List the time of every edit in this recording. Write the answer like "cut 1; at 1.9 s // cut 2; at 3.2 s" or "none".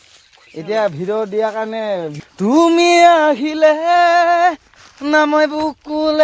cut 1; at 2.2 s